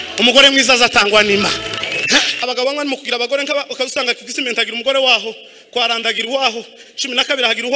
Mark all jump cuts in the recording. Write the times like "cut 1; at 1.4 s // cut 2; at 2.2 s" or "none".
cut 1; at 2.3 s